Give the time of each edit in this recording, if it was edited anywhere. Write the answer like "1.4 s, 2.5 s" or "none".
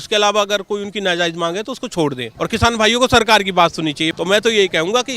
2.3 s, 4.1 s